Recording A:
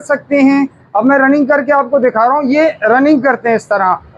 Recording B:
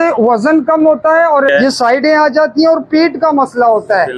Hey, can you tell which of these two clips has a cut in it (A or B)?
B